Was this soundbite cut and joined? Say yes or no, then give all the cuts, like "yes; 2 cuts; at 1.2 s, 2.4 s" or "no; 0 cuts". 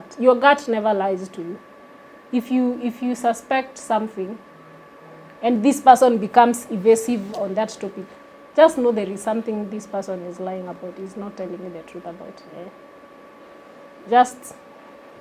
no; 0 cuts